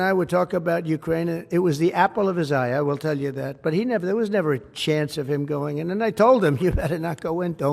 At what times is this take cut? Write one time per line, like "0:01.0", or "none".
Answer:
none